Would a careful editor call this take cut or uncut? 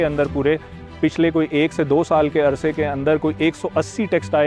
uncut